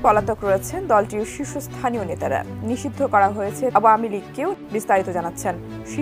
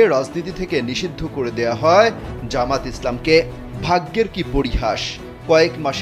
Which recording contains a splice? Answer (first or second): first